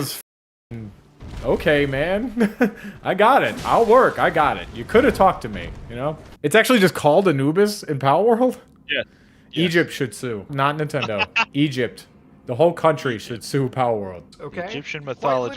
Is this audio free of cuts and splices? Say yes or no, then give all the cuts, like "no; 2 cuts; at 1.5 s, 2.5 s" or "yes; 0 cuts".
no; 2 cuts; at 6.2 s, 10.5 s